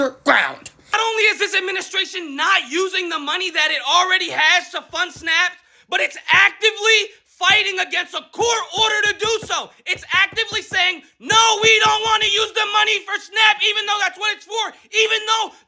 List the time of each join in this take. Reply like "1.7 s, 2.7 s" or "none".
0.9 s